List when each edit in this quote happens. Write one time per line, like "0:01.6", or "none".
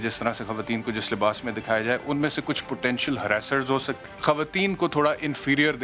0:04.0